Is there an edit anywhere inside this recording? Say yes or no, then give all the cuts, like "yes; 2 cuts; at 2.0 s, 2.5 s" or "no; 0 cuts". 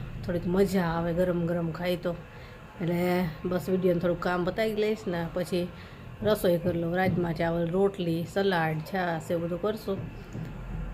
no; 0 cuts